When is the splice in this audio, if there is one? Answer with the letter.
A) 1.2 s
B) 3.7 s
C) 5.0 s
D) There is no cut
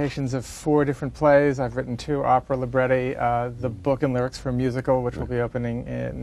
B